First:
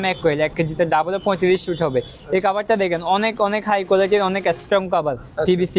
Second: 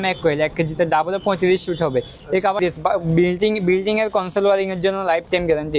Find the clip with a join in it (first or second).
second